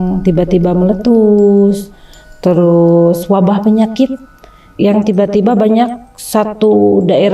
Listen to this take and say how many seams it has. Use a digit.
0